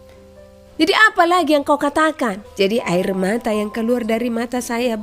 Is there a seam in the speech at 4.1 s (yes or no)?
no